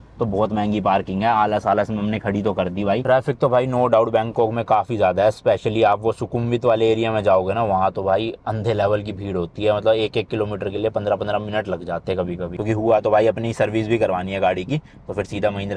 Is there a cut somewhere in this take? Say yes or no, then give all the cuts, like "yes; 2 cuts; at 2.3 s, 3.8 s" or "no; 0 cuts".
yes; 2 cuts; at 3.0 s, 12.5 s